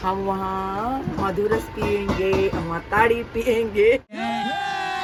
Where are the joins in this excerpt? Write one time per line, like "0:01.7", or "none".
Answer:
none